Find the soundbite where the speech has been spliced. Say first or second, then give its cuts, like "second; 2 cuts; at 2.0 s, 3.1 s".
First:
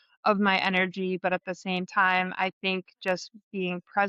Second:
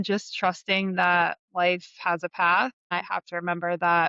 second; 1 cut; at 2.9 s